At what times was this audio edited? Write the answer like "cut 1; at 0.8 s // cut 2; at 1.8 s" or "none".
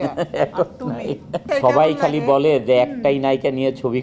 cut 1; at 1.4 s